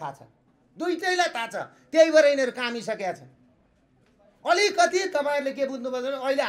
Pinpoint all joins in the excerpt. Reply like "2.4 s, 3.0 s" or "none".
none